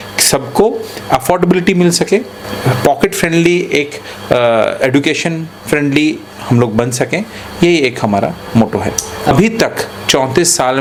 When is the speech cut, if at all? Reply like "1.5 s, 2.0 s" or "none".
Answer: none

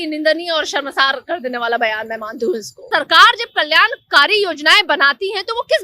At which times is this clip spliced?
2.8 s

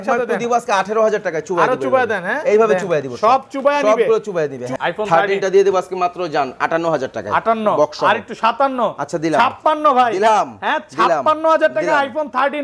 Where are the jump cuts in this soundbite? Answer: 4.7 s

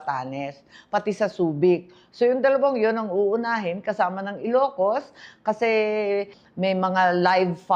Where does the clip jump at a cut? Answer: none

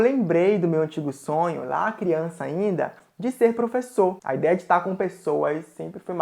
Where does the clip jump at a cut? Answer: 4.2 s

